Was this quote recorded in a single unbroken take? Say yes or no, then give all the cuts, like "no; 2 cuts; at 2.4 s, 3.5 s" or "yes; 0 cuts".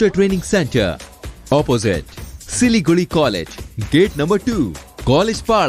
yes; 0 cuts